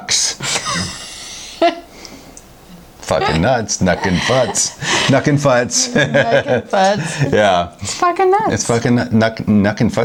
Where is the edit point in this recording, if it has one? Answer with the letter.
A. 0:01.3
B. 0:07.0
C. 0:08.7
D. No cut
D